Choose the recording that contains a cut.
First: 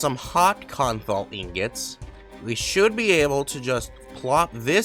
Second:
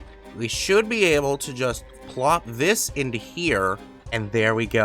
second; 1 cut; at 3.9 s

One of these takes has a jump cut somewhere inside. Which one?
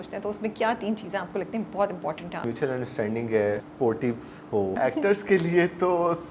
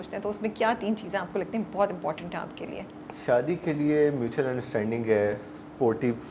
first; 3 cuts; at 2.4 s, 3.7 s, 4.8 s

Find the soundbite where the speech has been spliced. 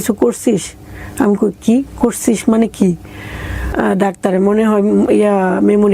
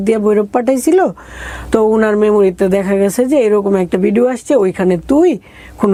first; 1 cut; at 3.7 s

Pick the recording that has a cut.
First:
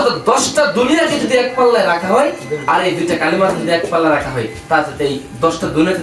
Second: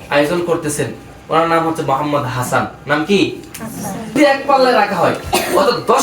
second; 1 cut; at 4.2 s

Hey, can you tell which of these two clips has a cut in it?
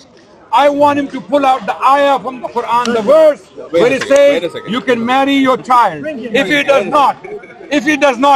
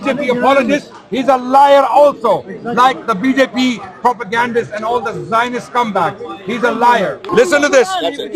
second; 1 cut; at 7.3 s

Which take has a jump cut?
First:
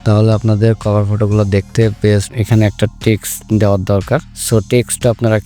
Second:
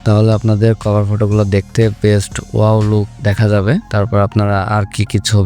first; 1 cut; at 2.3 s

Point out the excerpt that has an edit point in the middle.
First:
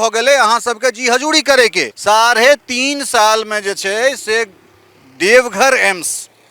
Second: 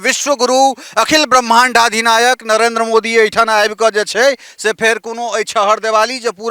first; 1 cut; at 1.9 s

